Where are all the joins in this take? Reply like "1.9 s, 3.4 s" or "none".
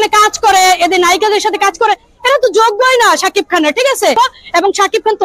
4.1 s